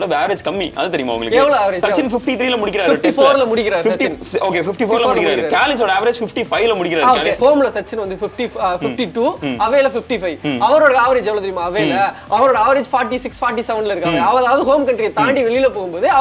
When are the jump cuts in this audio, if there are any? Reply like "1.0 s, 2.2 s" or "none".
1.8 s, 7.4 s